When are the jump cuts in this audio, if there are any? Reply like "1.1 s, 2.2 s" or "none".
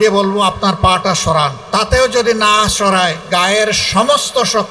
1.6 s, 3.2 s